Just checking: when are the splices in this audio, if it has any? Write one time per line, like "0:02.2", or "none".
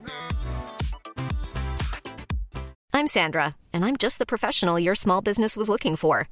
0:02.8